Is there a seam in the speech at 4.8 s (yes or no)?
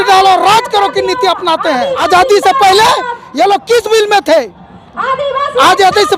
no